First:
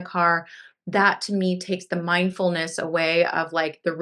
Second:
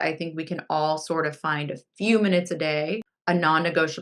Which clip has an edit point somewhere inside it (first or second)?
second